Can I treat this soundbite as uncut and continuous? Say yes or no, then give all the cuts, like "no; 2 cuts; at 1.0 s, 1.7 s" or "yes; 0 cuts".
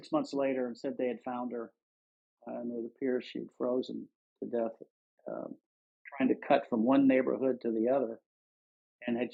yes; 0 cuts